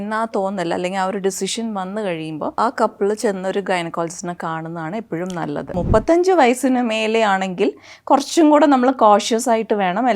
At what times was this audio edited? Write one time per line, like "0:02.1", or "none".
0:02.6
0:05.7